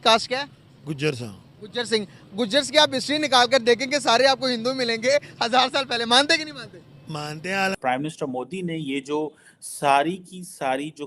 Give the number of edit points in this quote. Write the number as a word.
one